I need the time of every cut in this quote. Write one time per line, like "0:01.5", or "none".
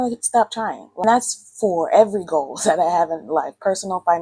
0:01.0